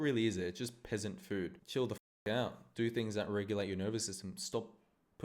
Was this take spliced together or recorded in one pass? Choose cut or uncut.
cut